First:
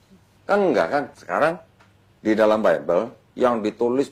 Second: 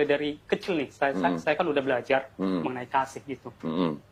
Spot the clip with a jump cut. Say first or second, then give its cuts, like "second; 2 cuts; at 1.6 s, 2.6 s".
first; 1 cut; at 1.2 s